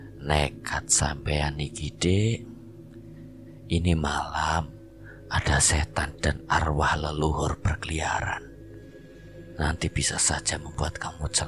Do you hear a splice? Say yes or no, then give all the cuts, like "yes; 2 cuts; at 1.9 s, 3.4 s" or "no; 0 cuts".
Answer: no; 0 cuts